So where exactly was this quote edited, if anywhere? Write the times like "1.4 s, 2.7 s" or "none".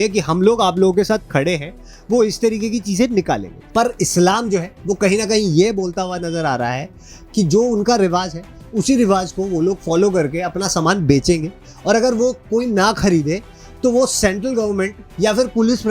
3.5 s